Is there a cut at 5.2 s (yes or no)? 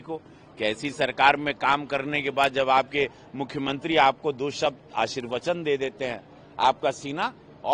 no